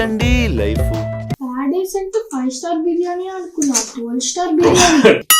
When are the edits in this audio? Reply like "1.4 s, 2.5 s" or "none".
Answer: 1.3 s